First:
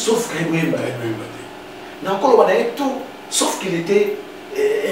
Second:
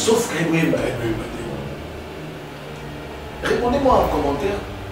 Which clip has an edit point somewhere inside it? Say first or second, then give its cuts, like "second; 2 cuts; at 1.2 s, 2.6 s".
second; 1 cut; at 1.5 s